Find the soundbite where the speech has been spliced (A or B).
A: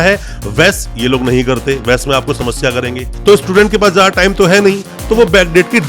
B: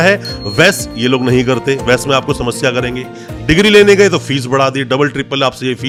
A